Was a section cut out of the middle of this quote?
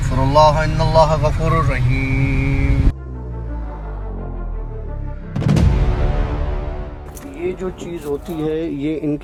no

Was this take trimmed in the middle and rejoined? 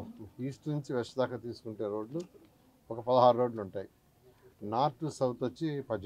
no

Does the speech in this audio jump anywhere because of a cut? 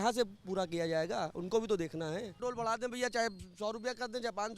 yes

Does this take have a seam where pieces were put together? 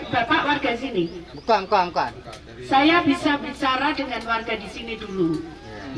no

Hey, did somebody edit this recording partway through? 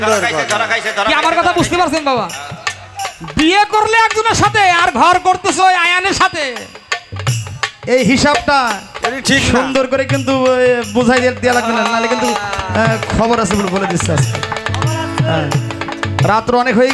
no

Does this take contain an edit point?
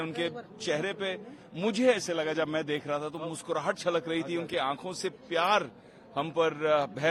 no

